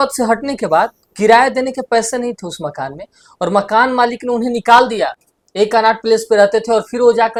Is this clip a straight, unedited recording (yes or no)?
yes